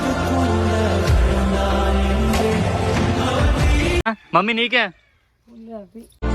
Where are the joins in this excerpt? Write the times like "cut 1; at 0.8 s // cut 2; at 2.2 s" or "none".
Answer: cut 1; at 4.1 s